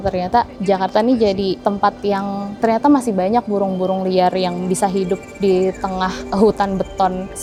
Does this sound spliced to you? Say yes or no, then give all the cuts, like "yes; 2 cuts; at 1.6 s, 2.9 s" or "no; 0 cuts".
no; 0 cuts